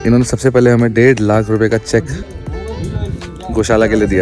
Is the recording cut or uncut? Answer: uncut